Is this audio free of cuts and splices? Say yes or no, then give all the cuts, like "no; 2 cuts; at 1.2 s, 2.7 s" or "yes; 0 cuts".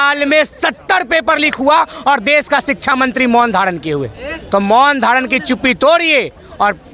yes; 0 cuts